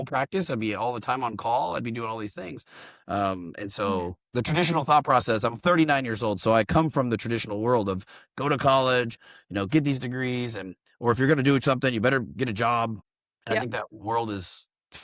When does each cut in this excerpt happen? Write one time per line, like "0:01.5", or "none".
0:13.1